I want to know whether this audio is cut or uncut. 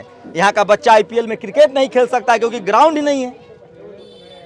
uncut